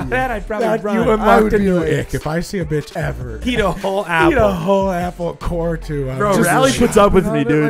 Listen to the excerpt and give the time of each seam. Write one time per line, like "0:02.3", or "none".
0:03.4